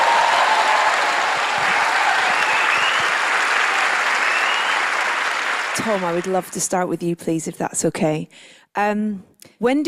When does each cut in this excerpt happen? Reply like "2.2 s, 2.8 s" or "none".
1.3 s

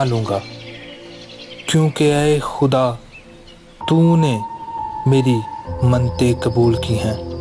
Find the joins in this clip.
none

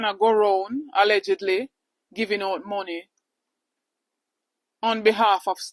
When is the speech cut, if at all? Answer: none

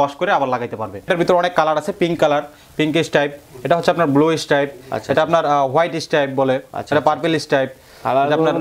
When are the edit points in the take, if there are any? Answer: 1.1 s

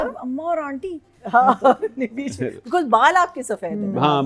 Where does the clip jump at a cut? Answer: none

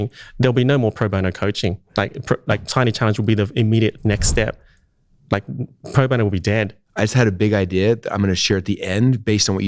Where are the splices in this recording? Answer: 1.8 s, 6.8 s

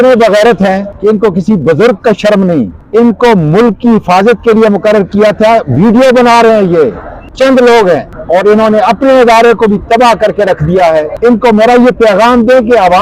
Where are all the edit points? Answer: 0.9 s, 2.8 s, 7.3 s, 8.1 s, 11.1 s

